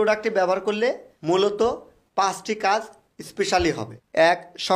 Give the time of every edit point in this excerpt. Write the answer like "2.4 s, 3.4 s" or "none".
1.1 s